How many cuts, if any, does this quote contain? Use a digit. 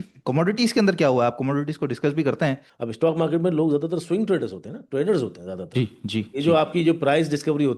1